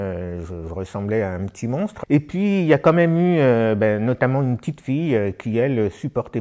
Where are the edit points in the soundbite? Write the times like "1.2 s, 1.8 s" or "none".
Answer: 2.0 s